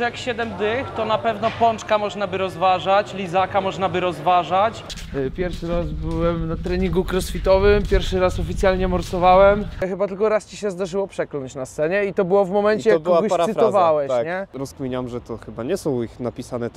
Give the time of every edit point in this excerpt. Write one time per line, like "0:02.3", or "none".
0:04.9
0:09.8
0:14.6